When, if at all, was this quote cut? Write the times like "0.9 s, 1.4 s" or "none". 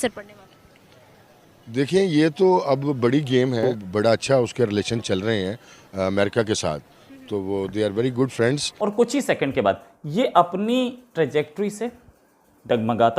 3.8 s, 8.7 s